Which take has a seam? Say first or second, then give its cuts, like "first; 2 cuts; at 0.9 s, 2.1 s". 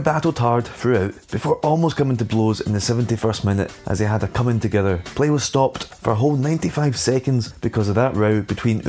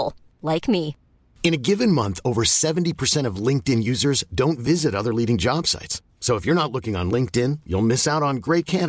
first; 5 cuts; at 1.2 s, 3.8 s, 5.1 s, 5.9 s, 7.5 s